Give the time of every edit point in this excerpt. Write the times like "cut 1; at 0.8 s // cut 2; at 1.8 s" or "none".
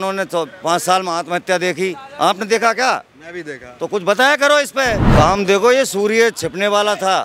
cut 1; at 5.0 s